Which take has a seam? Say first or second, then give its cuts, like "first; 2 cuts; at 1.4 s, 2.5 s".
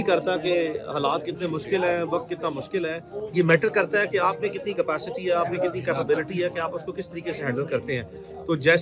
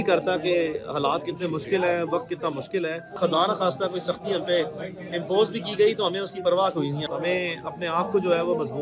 second; 2 cuts; at 3.2 s, 7.0 s